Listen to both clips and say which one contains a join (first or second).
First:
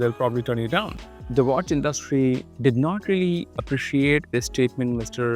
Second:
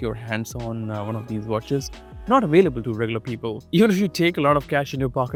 first